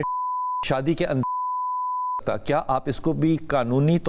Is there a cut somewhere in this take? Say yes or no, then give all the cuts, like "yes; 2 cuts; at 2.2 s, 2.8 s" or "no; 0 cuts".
no; 0 cuts